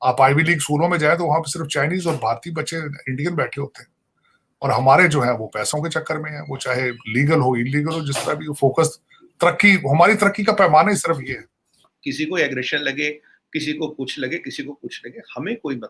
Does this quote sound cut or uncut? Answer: cut